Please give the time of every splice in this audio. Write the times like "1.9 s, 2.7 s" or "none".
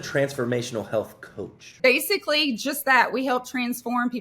1.7 s